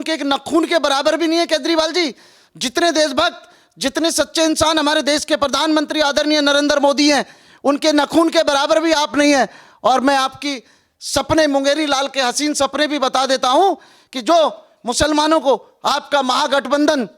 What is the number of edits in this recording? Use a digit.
0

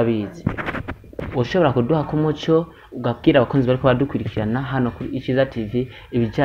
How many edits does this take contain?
1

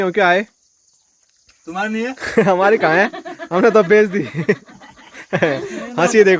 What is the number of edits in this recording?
0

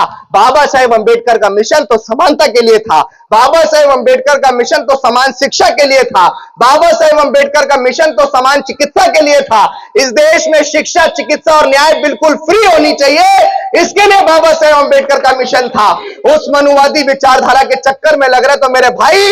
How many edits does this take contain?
1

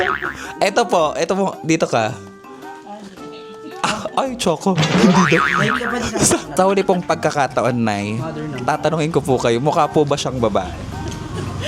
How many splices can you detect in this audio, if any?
1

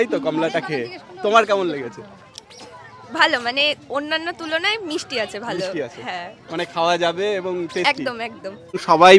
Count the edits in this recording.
0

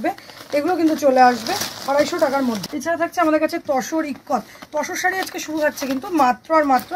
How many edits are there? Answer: 1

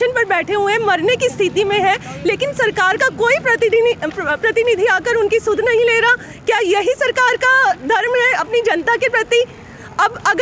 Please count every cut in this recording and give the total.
0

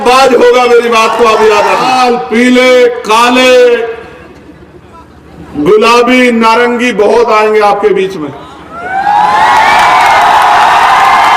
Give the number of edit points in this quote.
1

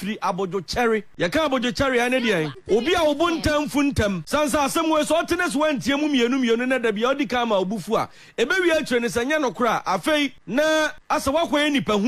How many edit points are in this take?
5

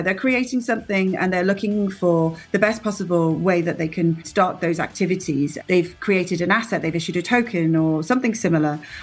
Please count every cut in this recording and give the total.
2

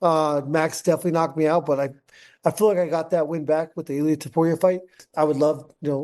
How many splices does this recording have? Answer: 1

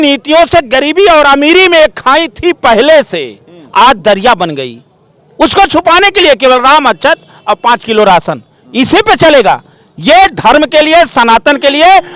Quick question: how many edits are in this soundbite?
0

